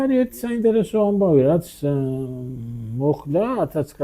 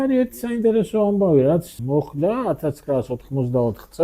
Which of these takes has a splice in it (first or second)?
second